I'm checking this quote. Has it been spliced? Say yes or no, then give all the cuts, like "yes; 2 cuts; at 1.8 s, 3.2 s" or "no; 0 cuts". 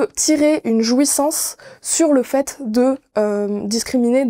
no; 0 cuts